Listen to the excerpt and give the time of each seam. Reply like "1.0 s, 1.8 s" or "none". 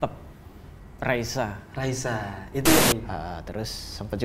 2.8 s